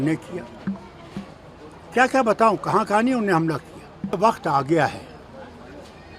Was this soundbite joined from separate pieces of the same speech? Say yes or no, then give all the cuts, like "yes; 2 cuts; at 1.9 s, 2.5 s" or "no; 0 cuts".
yes; 1 cut; at 4.2 s